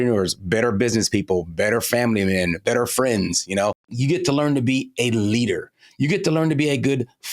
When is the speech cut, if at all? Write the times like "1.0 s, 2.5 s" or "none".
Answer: 2.6 s, 3.9 s